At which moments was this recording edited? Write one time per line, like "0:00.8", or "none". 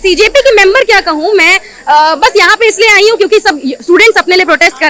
none